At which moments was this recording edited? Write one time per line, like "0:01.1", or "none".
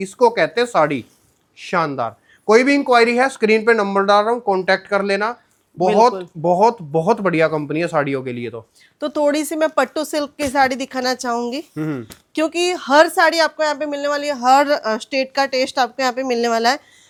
none